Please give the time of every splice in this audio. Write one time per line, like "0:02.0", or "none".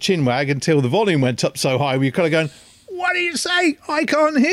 none